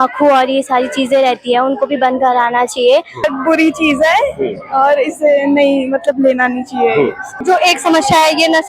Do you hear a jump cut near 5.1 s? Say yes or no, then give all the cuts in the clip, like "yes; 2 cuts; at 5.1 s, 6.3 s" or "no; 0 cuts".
no; 2 cuts; at 3.3 s, 7.4 s